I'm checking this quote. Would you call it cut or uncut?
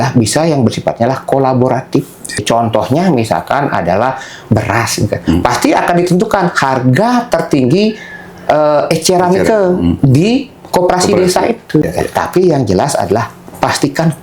cut